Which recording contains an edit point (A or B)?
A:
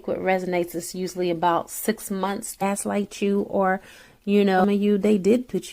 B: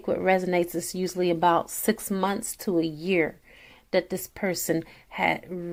A